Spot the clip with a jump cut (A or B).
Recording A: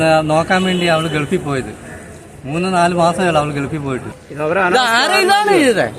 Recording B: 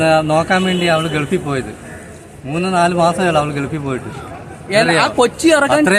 A